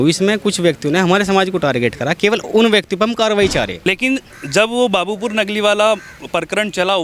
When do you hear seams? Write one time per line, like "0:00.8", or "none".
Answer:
0:03.8

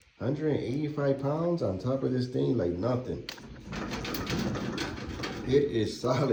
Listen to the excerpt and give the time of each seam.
none

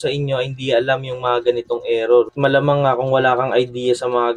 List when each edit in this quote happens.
0:02.3

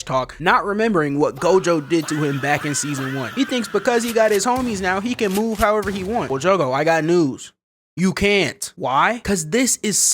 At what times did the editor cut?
none

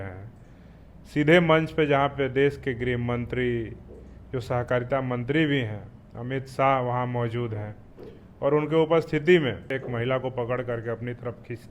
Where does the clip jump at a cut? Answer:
0:09.7

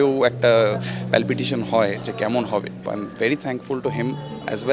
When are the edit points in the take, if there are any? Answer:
0:02.8

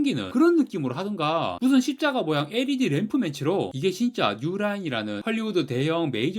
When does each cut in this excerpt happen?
0:03.7

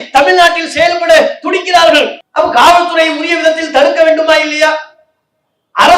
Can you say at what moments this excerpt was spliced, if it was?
0:02.2

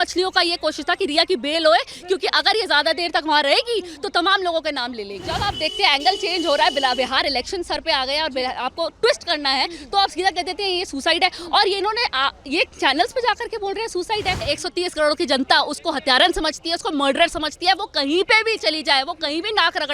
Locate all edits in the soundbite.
0:05.5
0:14.5

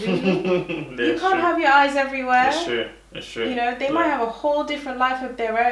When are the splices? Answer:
none

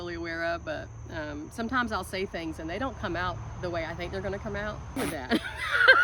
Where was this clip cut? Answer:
0:05.0

